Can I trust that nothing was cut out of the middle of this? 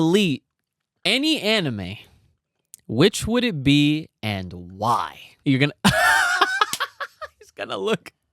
no; 1 cut; at 5.2 s

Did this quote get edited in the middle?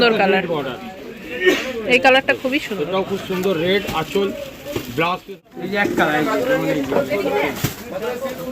yes; 1 cut; at 5.4 s

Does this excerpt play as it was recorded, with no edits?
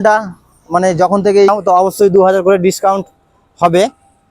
no; 1 cut; at 1.5 s

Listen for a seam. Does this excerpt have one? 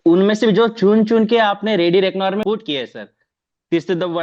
yes; 1 cut; at 2.4 s

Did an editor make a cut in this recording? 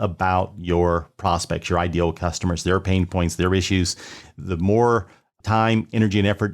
yes; 2 cuts; at 4.3 s, 5.3 s

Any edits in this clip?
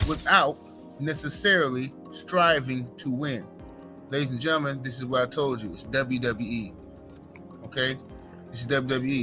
no; 0 cuts

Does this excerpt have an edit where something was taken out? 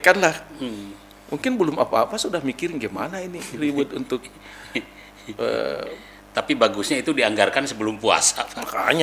no; 0 cuts

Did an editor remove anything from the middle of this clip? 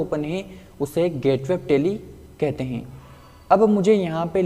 no; 0 cuts

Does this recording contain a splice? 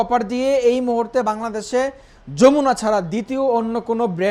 no; 0 cuts

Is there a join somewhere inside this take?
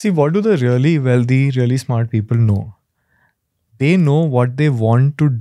no; 0 cuts

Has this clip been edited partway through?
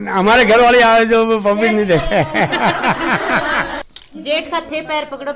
yes; 1 cut; at 3.8 s

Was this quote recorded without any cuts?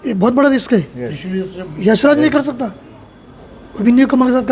yes; 0 cuts

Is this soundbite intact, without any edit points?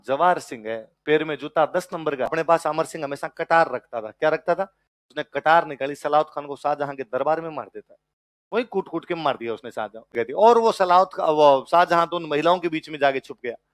no; 2 cuts; at 2.3 s, 10.0 s

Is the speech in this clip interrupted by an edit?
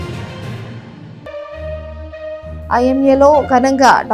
yes; 1 cut; at 2.6 s

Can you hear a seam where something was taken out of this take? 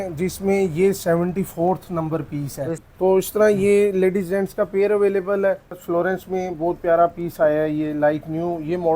yes; 2 cuts; at 2.8 s, 5.8 s

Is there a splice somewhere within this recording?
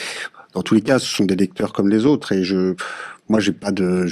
yes; 1 cut; at 2.9 s

